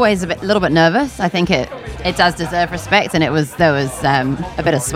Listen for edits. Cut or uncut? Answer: cut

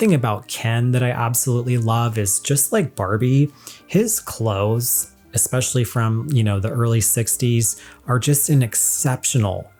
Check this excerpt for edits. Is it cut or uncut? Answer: uncut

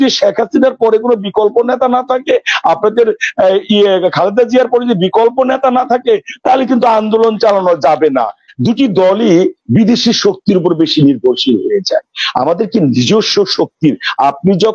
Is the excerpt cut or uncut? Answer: cut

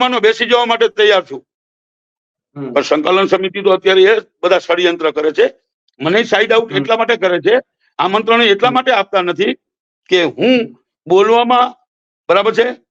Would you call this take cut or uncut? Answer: uncut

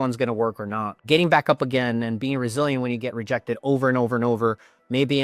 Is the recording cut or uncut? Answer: cut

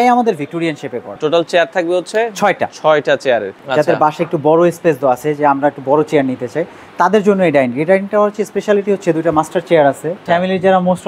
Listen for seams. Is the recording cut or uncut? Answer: cut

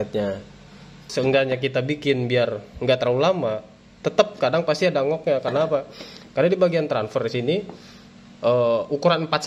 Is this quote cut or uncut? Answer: cut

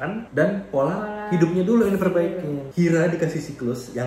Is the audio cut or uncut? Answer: cut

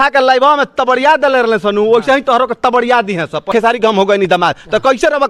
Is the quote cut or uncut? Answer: cut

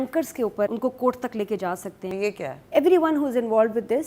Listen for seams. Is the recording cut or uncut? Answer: cut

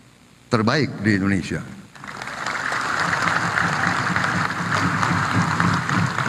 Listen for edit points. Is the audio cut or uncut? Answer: uncut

